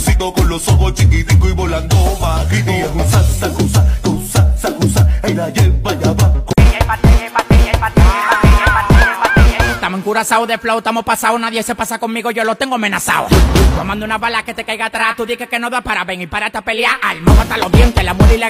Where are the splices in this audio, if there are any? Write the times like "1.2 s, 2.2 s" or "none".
6.5 s